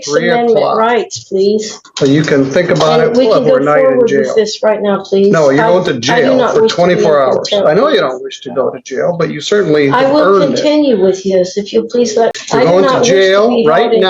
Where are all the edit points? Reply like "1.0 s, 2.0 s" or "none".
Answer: 12.3 s